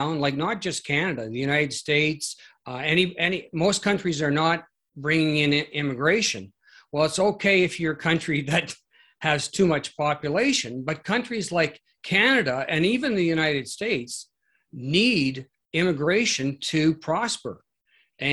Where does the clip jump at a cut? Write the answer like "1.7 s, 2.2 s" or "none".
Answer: none